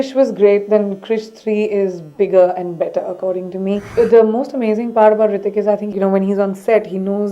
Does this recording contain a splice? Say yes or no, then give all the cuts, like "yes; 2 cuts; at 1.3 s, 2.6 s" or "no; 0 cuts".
yes; 2 cuts; at 3.9 s, 5.9 s